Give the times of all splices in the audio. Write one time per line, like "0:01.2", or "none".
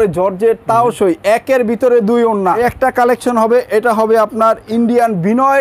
0:02.6